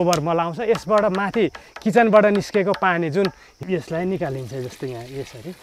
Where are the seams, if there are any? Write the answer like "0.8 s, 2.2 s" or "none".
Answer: 3.5 s

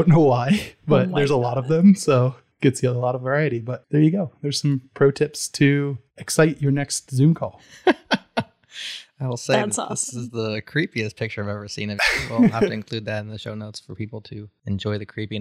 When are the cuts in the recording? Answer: 2.4 s, 3.7 s, 14.4 s

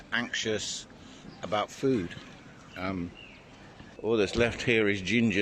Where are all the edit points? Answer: 4.0 s

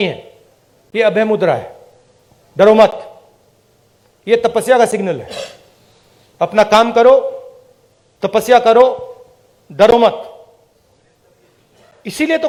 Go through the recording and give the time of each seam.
none

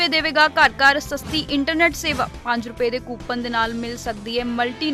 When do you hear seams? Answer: none

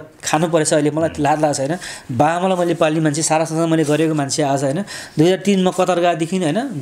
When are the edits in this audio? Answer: none

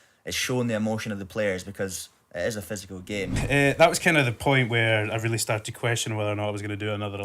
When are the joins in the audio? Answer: 3.4 s

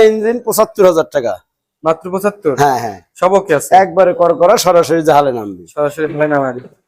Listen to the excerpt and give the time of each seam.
none

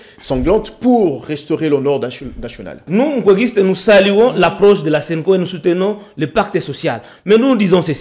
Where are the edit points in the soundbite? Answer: 2.8 s

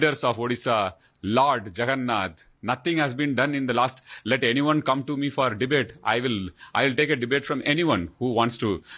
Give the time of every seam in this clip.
none

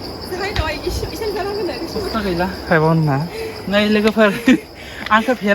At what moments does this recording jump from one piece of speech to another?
2.1 s

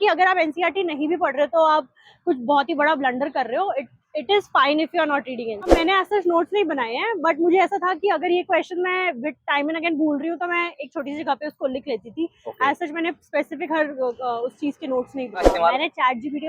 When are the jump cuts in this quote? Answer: 5.7 s, 15.5 s

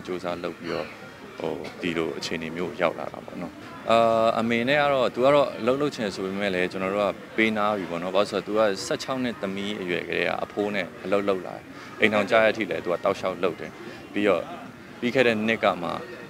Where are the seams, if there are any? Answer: 3.6 s

